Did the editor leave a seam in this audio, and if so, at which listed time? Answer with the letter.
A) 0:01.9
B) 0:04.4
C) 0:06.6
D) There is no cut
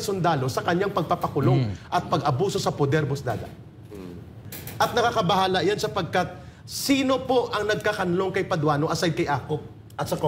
B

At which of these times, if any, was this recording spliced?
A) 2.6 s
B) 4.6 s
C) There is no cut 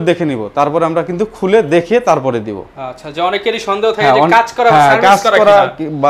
C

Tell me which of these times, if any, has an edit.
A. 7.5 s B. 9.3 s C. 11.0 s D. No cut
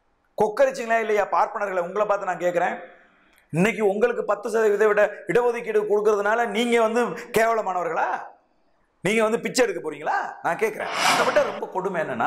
C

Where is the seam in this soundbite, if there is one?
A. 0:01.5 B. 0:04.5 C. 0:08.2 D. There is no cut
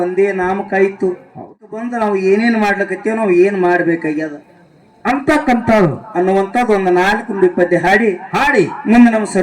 A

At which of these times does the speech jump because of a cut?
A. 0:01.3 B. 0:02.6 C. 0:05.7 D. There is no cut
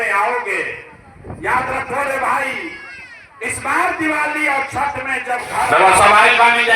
C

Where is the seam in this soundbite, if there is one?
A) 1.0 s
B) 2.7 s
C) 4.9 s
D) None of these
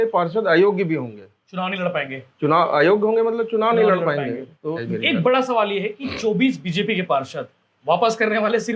C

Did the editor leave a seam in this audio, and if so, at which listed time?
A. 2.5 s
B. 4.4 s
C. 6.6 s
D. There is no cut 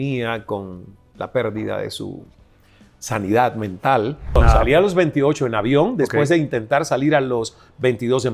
B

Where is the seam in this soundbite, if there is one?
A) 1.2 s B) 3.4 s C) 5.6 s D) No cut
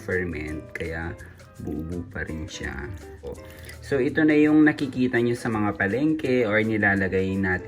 B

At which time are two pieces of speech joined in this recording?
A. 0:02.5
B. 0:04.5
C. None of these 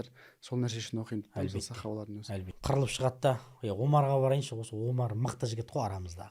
A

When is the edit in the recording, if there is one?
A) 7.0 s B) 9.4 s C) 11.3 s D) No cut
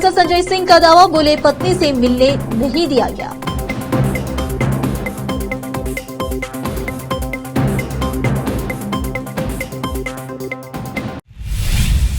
C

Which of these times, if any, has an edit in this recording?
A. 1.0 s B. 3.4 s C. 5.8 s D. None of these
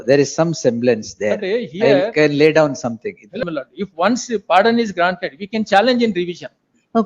B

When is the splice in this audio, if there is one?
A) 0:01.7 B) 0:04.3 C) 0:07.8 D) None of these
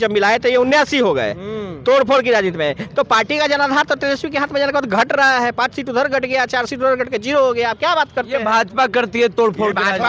D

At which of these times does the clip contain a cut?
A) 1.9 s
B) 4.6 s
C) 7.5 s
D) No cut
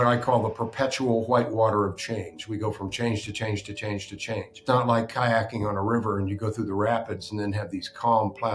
B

